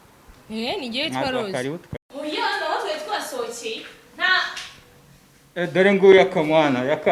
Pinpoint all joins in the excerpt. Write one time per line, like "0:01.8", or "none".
0:02.1